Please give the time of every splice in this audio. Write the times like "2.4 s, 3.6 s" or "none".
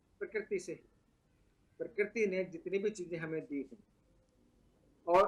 none